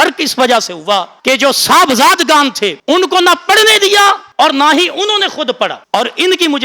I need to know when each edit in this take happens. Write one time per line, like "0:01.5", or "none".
0:01.1
0:02.7
0:04.2
0:05.8